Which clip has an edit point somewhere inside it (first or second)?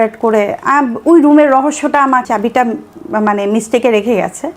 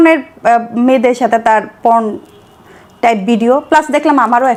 first